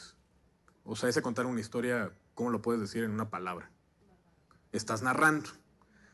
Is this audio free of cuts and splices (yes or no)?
no